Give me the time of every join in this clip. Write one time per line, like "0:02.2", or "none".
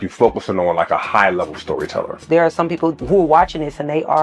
0:02.2
0:03.0